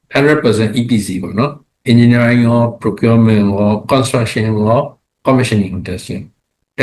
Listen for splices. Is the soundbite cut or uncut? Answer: uncut